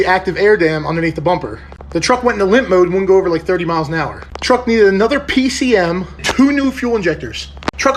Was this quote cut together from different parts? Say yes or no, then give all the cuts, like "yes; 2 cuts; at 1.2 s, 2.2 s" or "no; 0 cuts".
yes; 3 cuts; at 1.7 s, 4.3 s, 6.2 s